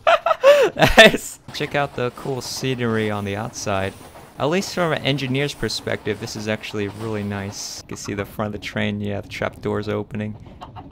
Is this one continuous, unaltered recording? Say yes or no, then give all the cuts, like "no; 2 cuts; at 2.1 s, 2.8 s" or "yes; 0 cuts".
no; 2 cuts; at 1.4 s, 7.9 s